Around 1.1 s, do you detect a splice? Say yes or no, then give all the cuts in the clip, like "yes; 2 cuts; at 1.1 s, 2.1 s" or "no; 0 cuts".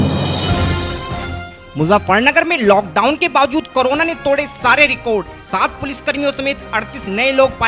yes; 1 cut; at 1.1 s